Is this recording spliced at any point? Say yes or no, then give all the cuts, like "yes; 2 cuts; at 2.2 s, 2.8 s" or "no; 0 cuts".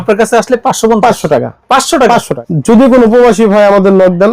yes; 1 cut; at 2.4 s